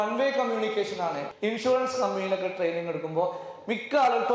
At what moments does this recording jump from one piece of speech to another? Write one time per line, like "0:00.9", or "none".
0:01.3